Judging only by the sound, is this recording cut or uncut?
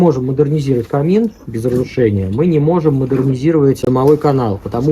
cut